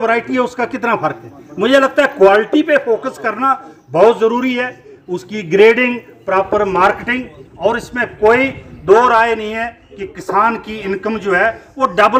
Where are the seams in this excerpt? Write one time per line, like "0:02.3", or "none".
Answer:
none